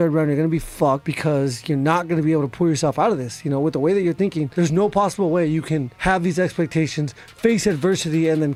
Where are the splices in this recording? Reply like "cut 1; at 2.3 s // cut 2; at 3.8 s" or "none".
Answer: none

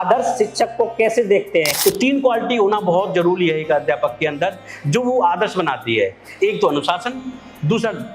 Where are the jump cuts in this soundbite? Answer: cut 1; at 1.7 s

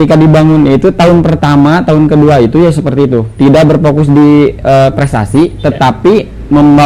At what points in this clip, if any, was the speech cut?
none

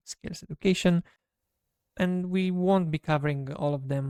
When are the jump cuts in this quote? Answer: none

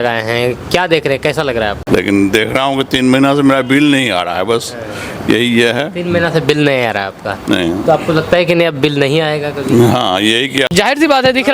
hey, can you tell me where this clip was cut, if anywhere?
cut 1; at 1.8 s // cut 2; at 10.3 s

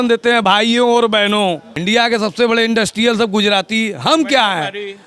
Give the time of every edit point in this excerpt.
cut 1; at 1.7 s

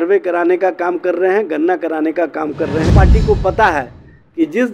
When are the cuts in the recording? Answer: cut 1; at 2.9 s

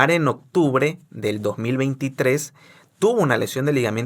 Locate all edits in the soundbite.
none

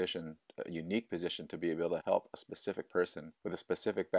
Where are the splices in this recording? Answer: cut 1; at 2.0 s // cut 2; at 3.3 s

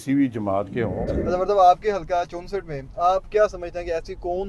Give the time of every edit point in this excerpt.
cut 1; at 1.0 s

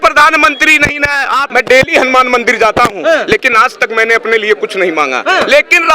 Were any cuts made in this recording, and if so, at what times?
cut 1; at 1.5 s

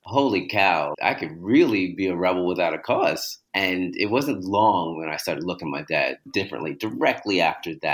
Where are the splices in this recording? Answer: cut 1; at 0.9 s // cut 2; at 3.3 s // cut 3; at 6.3 s

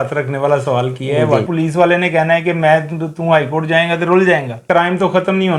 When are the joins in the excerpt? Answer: cut 1; at 1.5 s // cut 2; at 4.6 s

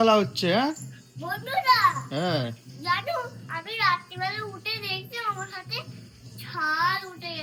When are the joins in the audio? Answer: none

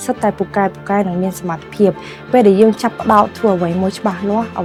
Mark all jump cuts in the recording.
none

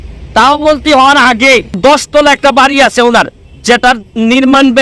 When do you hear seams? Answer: cut 1; at 1.8 s

